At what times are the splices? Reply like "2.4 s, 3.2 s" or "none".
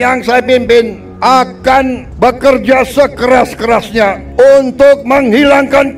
1.0 s, 2.1 s, 4.2 s